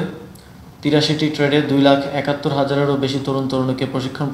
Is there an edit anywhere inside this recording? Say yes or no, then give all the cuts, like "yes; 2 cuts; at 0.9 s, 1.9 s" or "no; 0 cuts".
no; 0 cuts